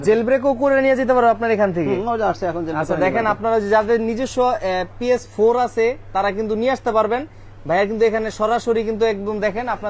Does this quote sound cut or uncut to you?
uncut